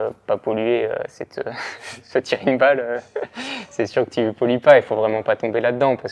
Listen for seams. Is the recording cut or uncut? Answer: uncut